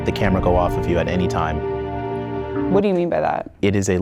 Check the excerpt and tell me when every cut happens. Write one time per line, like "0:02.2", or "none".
none